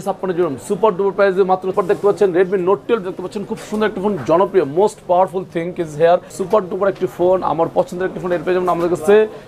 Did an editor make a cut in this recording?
yes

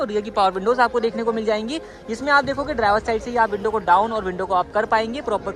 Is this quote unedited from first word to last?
yes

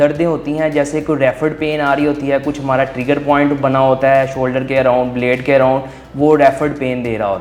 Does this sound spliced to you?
no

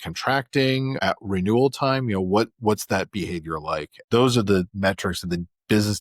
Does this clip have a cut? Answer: yes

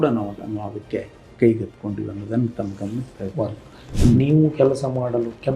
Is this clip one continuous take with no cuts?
no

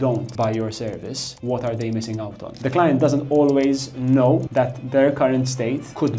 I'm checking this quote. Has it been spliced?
yes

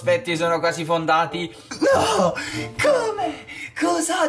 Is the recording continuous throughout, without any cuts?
no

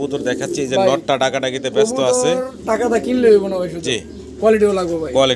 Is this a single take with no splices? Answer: yes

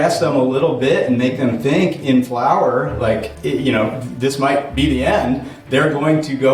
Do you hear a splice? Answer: no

